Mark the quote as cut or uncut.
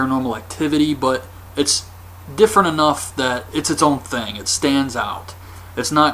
uncut